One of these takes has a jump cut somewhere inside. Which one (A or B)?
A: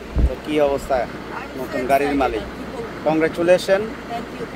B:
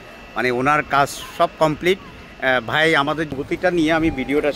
B